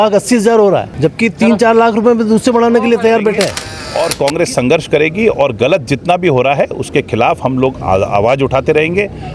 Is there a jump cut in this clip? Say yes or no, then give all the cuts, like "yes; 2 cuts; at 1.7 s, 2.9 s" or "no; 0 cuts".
yes; 2 cuts; at 0.9 s, 3.6 s